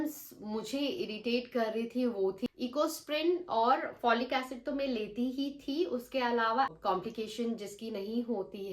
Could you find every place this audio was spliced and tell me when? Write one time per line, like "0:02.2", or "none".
0:02.5
0:06.7